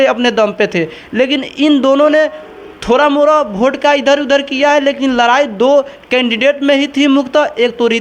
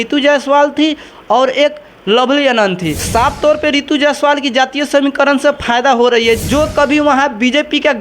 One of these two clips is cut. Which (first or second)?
second